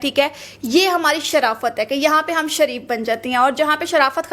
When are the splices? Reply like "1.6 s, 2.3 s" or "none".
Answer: none